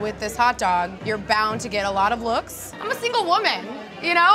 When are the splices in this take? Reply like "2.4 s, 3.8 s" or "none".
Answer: 1.0 s